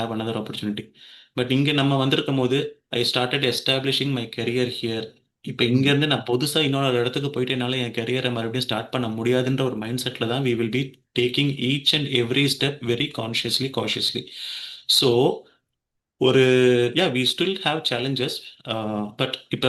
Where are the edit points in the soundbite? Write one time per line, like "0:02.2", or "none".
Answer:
none